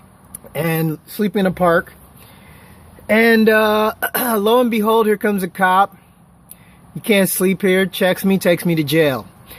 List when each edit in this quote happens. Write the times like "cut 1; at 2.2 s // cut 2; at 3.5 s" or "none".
cut 1; at 5.2 s